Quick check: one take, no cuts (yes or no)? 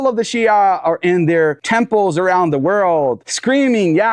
yes